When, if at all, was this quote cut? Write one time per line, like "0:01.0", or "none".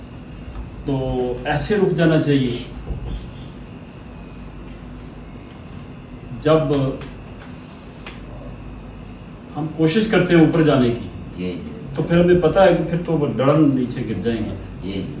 none